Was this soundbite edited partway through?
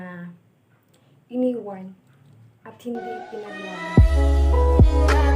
yes; 1 cut; at 3.7 s

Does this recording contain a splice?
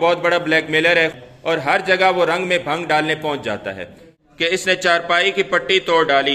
yes; 2 cuts; at 1.1 s, 4.5 s

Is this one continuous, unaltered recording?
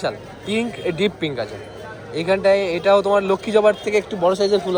yes; 0 cuts

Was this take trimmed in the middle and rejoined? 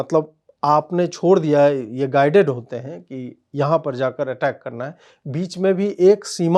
no; 0 cuts

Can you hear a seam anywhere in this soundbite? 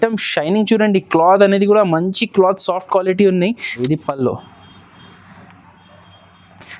yes; 1 cut; at 3.8 s

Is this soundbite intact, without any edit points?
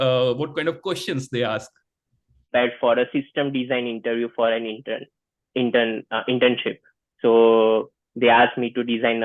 no; 1 cut; at 2.5 s

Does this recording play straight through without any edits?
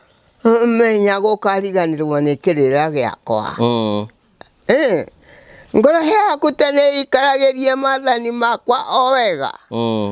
yes; 0 cuts

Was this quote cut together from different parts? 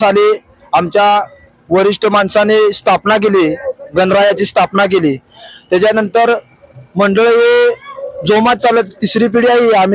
no; 0 cuts

